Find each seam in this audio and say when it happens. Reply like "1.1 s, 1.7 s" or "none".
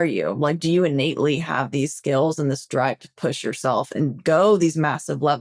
none